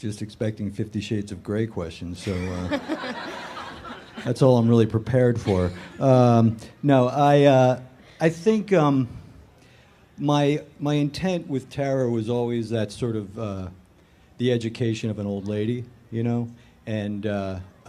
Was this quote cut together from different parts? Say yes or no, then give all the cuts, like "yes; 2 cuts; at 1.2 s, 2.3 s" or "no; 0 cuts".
yes; 1 cut; at 7.0 s